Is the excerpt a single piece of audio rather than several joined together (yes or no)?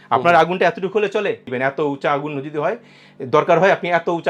no